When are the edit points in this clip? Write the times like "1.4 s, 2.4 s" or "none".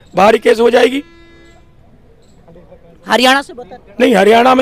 none